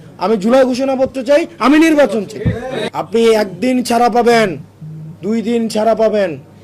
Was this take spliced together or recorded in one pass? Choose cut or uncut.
cut